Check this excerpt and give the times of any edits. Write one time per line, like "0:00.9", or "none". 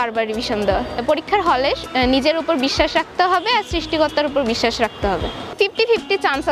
0:01.0
0:05.6